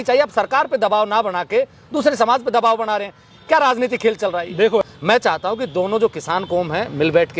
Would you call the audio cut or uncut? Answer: cut